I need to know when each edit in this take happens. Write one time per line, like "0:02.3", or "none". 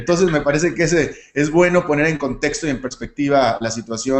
0:01.2